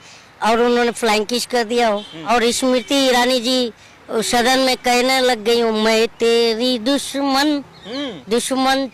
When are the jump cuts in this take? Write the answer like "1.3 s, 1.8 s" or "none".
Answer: 2.1 s